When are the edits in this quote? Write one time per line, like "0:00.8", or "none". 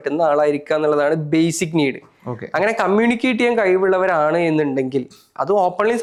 none